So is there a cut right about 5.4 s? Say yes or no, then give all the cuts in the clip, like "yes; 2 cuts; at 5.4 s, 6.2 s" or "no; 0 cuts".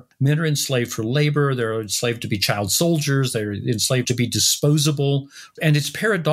yes; 2 cuts; at 4.1 s, 5.4 s